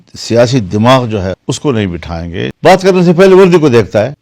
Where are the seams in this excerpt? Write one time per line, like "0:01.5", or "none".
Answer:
0:02.5